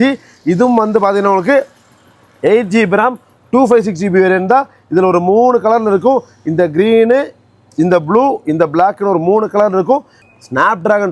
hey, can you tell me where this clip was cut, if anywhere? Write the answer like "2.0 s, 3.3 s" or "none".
10.2 s